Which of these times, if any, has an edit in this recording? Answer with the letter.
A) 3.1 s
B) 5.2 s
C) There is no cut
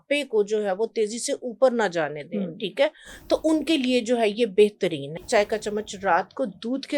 B